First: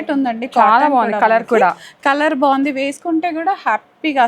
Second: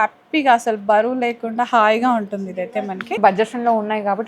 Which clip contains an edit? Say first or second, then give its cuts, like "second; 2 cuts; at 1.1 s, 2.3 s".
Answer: second; 1 cut; at 3.2 s